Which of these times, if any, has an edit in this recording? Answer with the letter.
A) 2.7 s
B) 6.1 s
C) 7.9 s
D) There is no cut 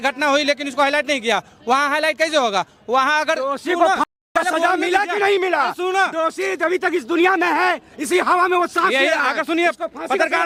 D